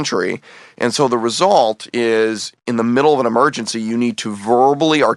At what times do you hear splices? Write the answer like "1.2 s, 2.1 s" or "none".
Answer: none